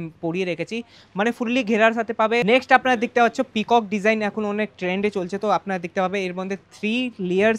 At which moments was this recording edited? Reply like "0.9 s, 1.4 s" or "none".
2.4 s